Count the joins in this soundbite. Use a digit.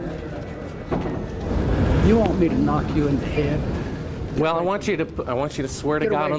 1